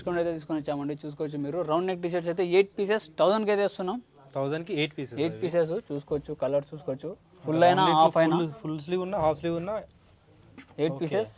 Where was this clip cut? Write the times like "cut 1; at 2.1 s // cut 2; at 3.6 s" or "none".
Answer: none